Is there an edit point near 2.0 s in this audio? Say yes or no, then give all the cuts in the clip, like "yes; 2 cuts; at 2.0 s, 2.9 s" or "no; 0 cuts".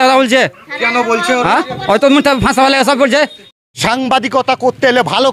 no; 1 cut; at 3.5 s